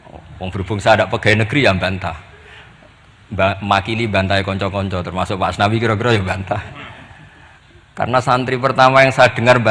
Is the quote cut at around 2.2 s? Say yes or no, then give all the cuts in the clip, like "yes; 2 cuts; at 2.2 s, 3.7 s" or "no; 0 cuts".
no; 0 cuts